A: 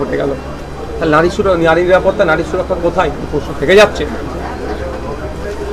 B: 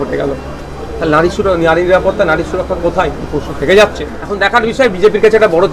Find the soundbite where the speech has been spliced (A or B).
B